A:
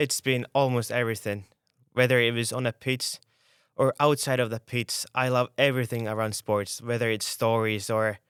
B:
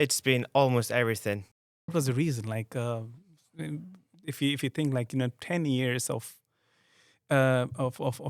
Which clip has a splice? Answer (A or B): B